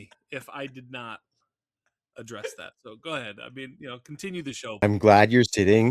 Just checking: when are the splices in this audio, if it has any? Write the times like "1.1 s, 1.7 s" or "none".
4.8 s